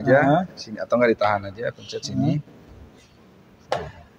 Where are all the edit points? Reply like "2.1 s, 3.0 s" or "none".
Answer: none

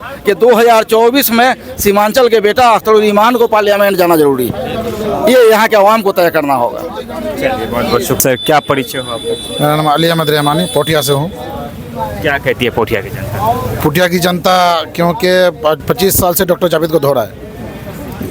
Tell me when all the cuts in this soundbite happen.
none

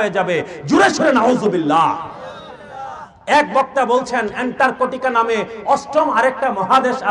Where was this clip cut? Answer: none

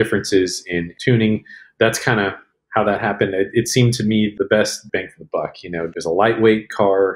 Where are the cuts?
0.9 s, 5.9 s

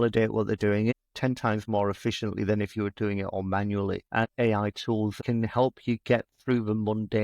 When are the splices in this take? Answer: 0.9 s, 4.1 s, 5.2 s

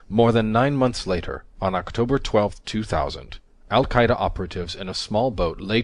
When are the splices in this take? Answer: 3.9 s

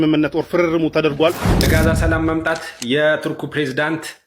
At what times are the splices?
1.6 s

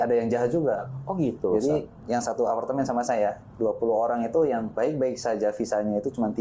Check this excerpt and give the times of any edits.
1.9 s, 4.8 s

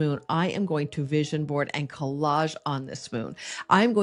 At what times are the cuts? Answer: none

